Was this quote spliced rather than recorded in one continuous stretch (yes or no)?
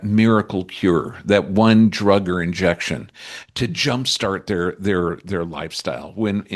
no